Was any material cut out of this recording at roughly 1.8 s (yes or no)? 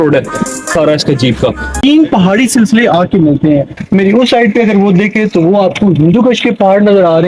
yes